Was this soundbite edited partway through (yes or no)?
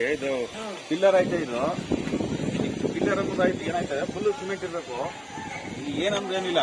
no